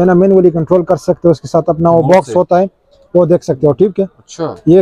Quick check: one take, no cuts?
yes; 0 cuts

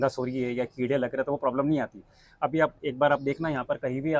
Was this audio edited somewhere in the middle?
no; 0 cuts

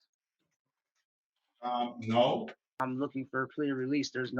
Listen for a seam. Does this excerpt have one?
yes; 1 cut; at 2.7 s

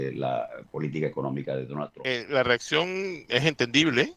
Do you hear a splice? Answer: yes; 1 cut; at 2.0 s

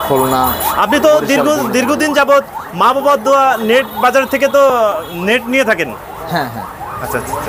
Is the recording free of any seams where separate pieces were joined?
yes; 0 cuts

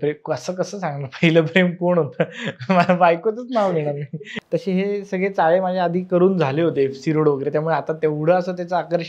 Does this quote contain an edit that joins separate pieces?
yes; 1 cut; at 4.3 s

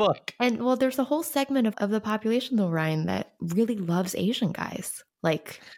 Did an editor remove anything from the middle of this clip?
yes; 2 cuts; at 1.8 s, 3.4 s

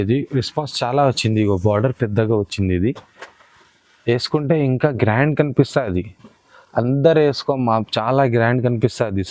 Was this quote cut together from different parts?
no; 0 cuts

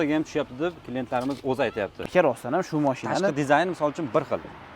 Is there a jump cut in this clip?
yes; 1 cut; at 2.0 s

